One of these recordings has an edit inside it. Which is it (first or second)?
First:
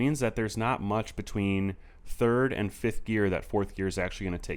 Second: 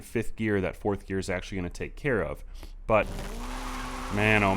second